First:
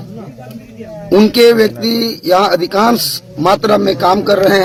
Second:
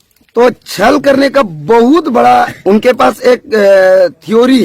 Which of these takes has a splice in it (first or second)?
second